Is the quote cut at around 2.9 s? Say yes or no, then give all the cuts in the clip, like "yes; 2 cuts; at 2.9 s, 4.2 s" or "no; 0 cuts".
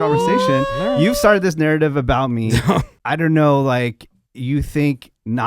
yes; 1 cut; at 2.9 s